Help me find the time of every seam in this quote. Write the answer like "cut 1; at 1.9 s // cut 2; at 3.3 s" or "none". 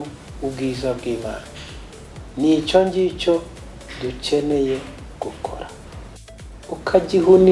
cut 1; at 6.2 s